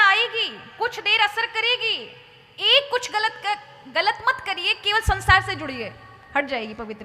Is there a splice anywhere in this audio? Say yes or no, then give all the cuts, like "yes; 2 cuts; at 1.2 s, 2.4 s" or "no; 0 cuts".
no; 0 cuts